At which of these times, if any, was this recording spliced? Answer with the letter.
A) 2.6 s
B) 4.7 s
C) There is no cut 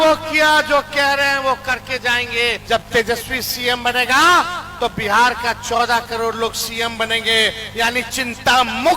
A